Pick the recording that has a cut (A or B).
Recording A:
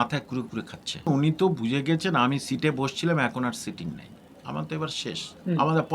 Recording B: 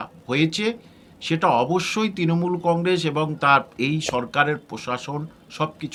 A